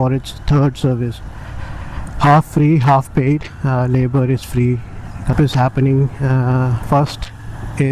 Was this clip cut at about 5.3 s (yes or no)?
yes